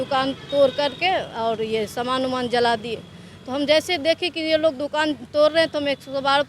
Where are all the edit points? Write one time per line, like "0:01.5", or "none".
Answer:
none

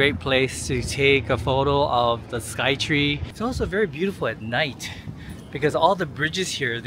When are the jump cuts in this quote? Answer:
0:03.3

